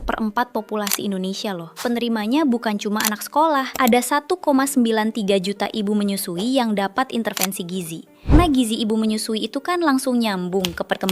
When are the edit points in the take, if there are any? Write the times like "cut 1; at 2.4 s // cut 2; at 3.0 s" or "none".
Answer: cut 1; at 1.8 s // cut 2; at 3.7 s // cut 3; at 8.3 s